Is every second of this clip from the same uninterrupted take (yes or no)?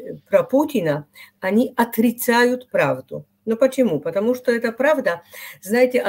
yes